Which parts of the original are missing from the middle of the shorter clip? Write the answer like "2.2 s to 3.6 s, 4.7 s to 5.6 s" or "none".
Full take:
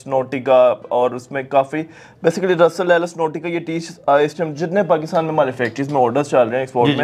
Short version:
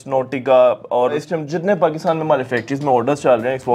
1.2 s to 4.3 s